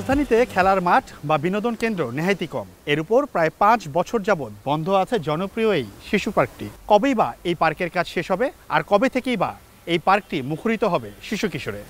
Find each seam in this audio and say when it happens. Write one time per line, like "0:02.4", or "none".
0:02.7
0:06.7
0:08.6